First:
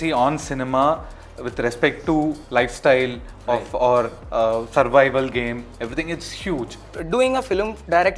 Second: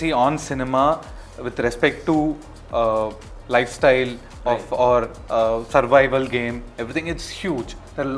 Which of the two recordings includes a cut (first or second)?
first